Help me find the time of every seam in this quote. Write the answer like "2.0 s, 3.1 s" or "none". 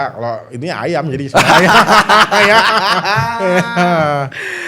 none

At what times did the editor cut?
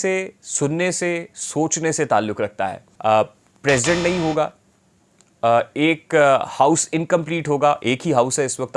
2.9 s

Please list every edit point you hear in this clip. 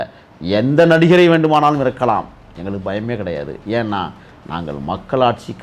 none

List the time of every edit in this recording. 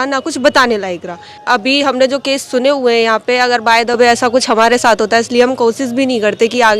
1.3 s

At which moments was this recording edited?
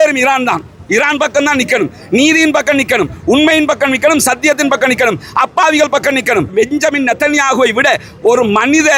none

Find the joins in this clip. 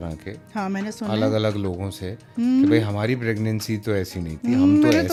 none

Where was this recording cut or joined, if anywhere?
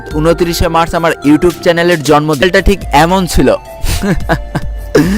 2.4 s

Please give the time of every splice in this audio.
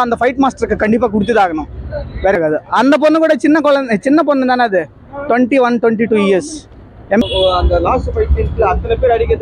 2.4 s, 7.2 s

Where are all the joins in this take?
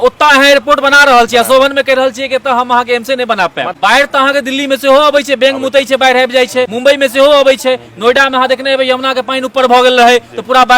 3.8 s, 6.7 s

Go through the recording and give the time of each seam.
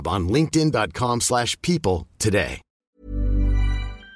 2.8 s

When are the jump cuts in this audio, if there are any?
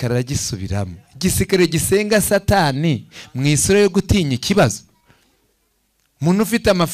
none

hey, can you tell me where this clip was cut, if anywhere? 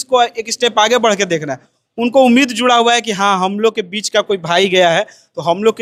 none

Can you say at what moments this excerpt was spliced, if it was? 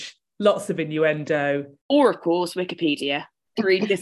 1.7 s

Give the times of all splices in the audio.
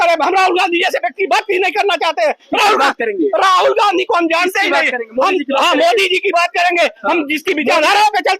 none

